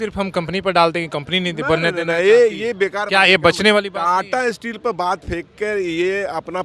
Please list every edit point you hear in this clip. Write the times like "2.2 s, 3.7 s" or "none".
none